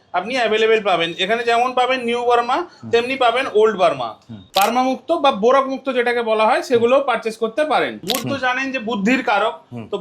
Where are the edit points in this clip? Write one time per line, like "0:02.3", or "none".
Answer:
0:04.3
0:08.1